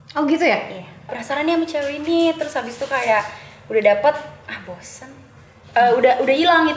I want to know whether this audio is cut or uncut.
cut